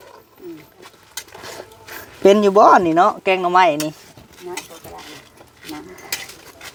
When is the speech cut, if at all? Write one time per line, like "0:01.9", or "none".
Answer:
none